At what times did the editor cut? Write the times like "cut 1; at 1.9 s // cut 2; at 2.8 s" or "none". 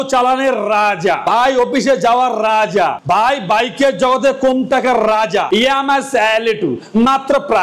cut 1; at 5.5 s

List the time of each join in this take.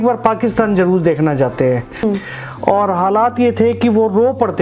cut 1; at 2.0 s

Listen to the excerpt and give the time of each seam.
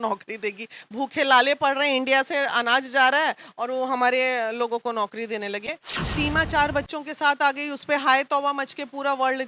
cut 1; at 5.7 s

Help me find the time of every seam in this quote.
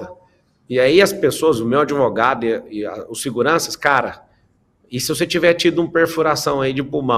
none

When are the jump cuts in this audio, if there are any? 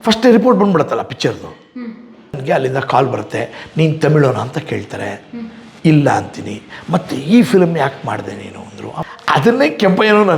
cut 1; at 2.4 s // cut 2; at 9.0 s

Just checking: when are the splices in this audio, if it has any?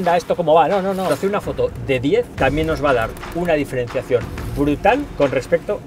cut 1; at 1.1 s // cut 2; at 2.3 s // cut 3; at 5.1 s

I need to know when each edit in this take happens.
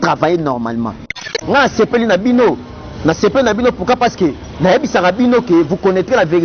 cut 1; at 1.2 s

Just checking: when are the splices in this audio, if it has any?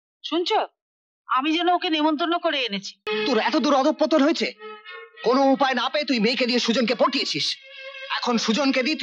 cut 1; at 3.0 s

